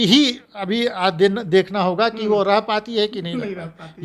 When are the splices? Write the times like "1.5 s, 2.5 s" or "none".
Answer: none